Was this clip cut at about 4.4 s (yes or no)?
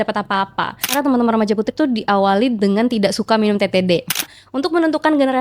yes